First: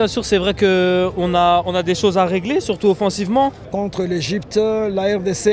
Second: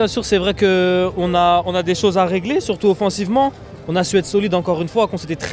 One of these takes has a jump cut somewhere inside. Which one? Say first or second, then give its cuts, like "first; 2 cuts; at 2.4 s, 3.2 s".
first; 1 cut; at 3.6 s